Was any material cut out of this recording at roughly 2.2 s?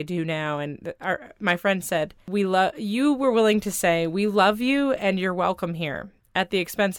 yes; 1 cut; at 2.2 s

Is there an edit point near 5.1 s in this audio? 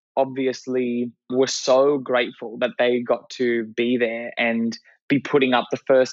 no; 1 cut; at 1.3 s

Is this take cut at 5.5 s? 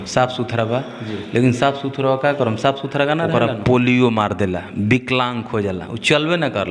no; 1 cut; at 3.3 s

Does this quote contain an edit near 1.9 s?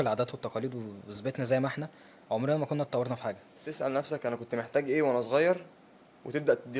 no; 1 cut; at 3.7 s

